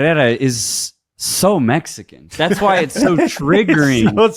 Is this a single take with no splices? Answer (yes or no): yes